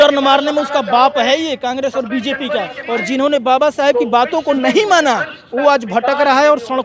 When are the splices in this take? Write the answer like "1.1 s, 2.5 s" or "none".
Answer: 2.8 s